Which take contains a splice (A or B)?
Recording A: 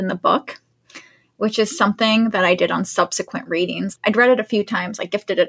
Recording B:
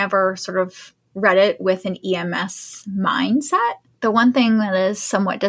A